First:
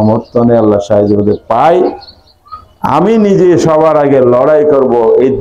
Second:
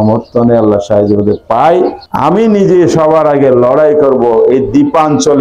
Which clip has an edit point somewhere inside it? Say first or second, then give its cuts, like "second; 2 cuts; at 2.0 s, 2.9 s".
second; 1 cut; at 2.0 s